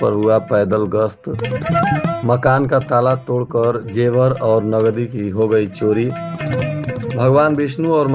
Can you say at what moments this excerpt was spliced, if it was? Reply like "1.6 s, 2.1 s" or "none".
none